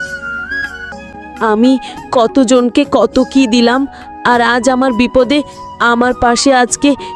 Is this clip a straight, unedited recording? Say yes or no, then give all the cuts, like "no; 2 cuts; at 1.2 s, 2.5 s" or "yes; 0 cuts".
no; 1 cut; at 0.9 s